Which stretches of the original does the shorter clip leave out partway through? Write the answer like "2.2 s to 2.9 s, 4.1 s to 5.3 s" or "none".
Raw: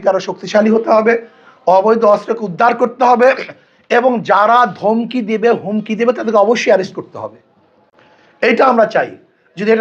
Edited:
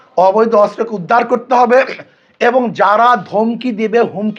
none